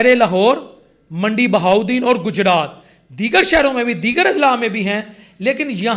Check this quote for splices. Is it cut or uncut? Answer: uncut